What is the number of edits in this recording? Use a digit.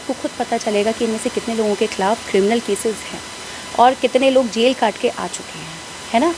0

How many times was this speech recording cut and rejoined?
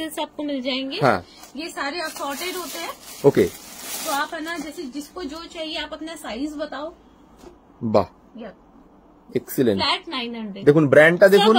0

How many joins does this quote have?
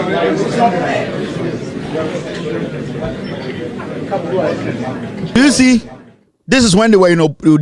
1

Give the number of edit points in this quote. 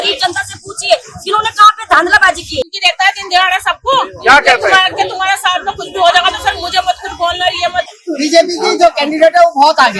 2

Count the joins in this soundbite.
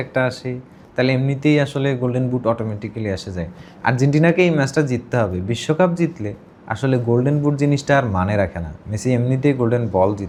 0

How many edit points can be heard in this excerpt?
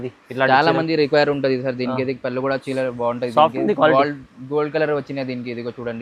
0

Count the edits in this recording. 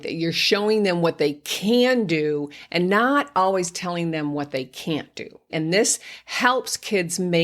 1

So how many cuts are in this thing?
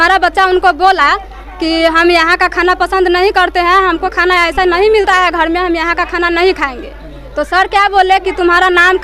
0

